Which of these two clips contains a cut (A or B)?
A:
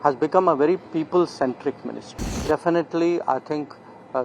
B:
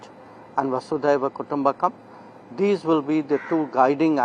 A